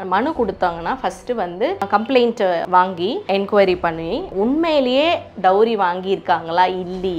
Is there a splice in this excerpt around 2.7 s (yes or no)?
yes